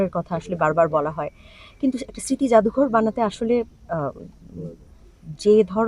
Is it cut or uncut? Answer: uncut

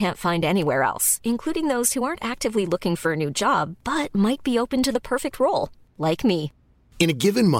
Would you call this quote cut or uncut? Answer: uncut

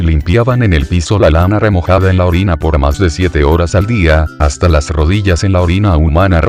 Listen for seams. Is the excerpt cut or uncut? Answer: uncut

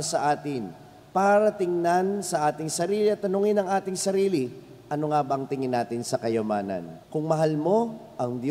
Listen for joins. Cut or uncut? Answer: cut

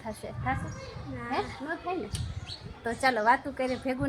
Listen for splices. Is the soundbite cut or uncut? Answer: uncut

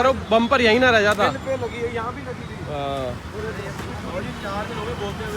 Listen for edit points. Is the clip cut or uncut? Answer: uncut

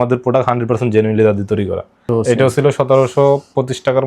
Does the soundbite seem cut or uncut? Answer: cut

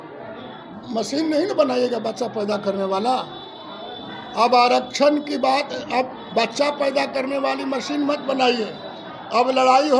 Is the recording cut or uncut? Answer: uncut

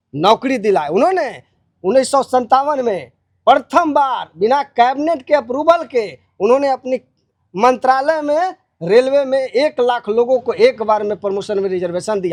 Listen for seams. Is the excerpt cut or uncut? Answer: uncut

